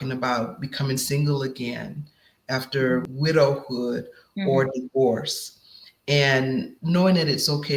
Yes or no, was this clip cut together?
yes